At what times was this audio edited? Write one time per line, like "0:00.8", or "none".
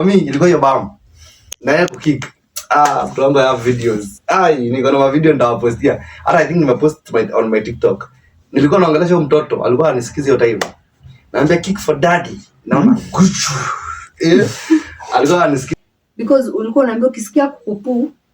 0:15.7